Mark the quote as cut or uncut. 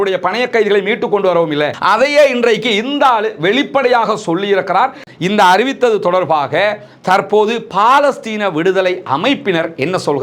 cut